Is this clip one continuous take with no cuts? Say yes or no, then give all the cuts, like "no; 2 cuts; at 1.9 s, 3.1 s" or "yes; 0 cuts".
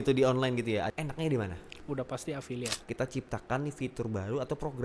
no; 3 cuts; at 0.9 s, 1.8 s, 2.8 s